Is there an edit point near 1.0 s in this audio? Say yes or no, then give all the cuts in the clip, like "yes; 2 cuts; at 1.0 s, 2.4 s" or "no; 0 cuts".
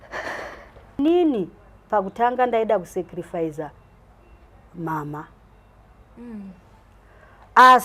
yes; 1 cut; at 1.0 s